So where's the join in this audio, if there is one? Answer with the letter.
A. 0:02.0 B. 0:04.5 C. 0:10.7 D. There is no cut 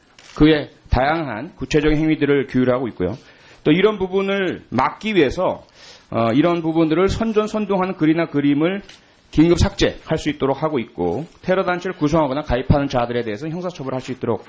A